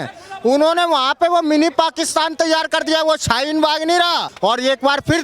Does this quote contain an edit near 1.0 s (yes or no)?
no